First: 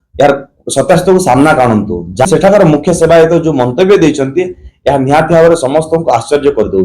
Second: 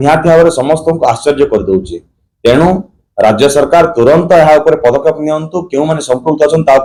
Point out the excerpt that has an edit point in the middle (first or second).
first